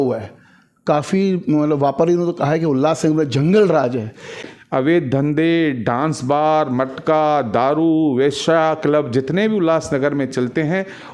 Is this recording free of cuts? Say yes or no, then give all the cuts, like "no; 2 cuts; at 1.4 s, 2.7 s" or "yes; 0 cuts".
no; 1 cut; at 4.4 s